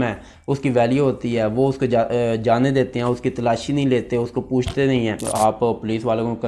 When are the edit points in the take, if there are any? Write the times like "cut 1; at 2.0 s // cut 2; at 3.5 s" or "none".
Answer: cut 1; at 5.2 s